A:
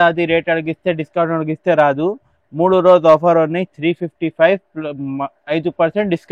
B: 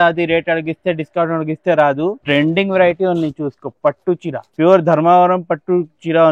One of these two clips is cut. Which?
B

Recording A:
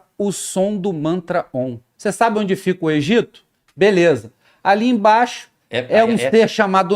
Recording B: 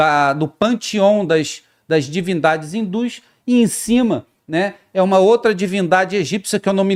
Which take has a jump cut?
A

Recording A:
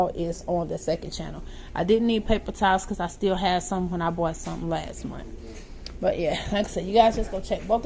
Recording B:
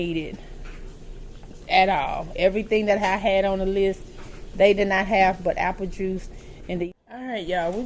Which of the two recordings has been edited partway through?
B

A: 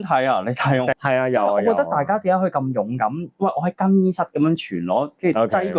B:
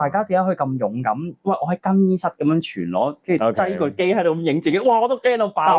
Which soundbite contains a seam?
A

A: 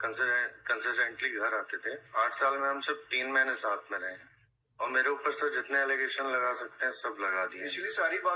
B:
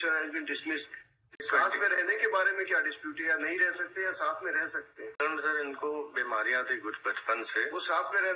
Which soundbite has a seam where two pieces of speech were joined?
B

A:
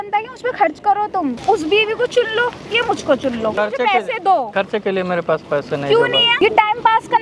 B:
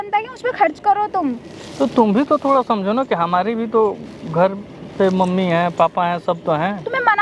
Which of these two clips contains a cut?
A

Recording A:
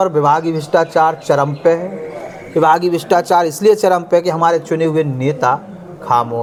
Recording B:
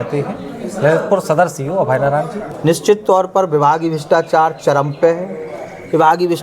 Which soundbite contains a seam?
B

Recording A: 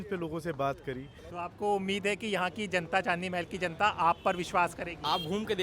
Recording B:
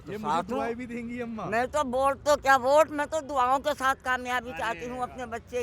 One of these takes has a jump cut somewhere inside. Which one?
A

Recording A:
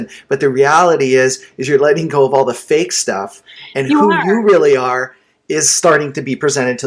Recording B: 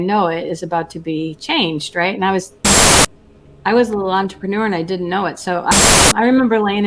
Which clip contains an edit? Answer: B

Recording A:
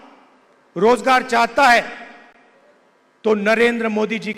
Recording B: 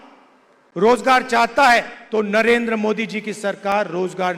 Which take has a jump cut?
B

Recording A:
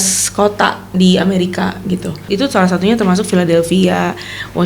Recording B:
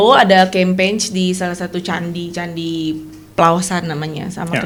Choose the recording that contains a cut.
A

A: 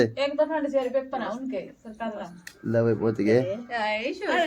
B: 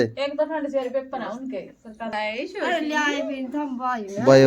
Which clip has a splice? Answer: B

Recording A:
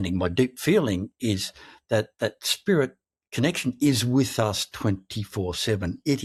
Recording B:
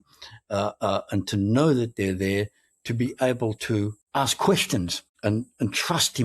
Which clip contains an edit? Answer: B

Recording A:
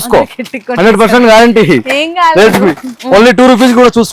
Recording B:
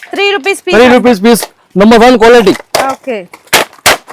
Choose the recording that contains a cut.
A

